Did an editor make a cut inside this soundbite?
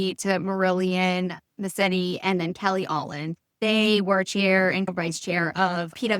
yes; 2 cuts; at 3.6 s, 4.9 s

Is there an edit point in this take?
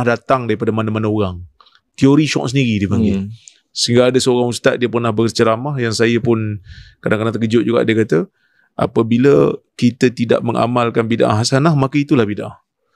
no; 0 cuts

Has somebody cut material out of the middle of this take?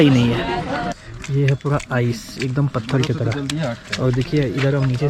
yes; 1 cut; at 1.1 s

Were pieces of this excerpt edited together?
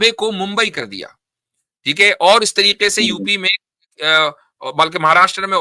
no; 0 cuts

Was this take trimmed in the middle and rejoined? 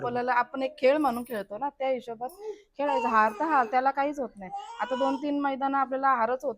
no; 0 cuts

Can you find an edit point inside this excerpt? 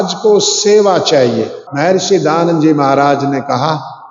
yes; 1 cut; at 1.6 s

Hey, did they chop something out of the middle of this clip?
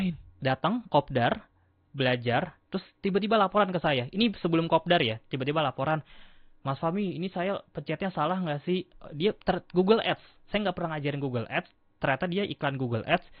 no; 0 cuts

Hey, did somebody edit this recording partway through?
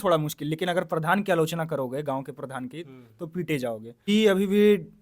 yes; 1 cut; at 4.1 s

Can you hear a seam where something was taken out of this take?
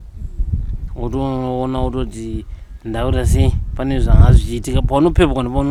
no; 0 cuts

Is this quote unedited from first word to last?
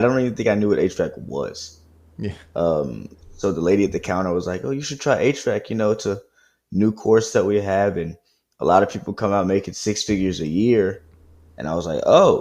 yes; 0 cuts

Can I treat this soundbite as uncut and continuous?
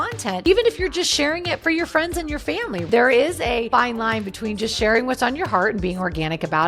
no; 1 cut; at 2.8 s

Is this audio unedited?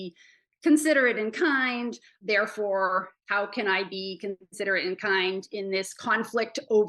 no; 1 cut; at 2.1 s

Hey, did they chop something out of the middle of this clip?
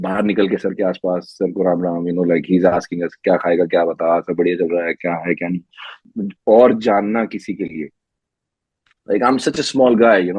yes; 1 cut; at 6.0 s

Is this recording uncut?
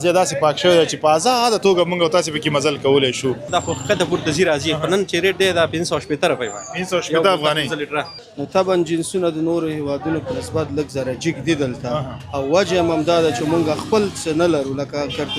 no; 2 cuts; at 3.5 s, 8.1 s

